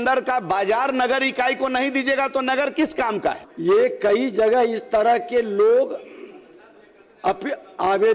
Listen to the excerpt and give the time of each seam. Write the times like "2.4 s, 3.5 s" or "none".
3.5 s